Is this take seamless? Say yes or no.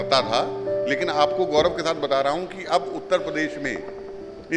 yes